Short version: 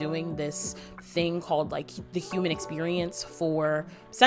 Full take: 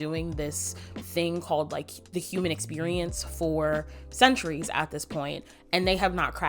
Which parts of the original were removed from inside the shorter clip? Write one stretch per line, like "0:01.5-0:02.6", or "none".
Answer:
none